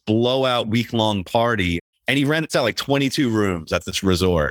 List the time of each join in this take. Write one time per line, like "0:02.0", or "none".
0:01.9